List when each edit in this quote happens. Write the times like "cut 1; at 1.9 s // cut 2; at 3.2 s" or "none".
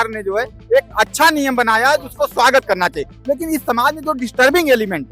none